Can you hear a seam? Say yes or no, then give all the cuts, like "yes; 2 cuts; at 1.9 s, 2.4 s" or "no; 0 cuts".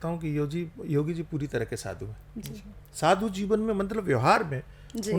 no; 0 cuts